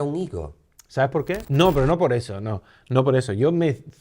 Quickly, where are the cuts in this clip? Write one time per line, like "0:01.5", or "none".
0:01.4